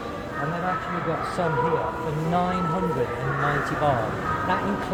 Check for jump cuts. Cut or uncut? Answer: uncut